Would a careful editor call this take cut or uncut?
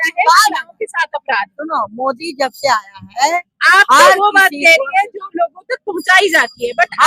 uncut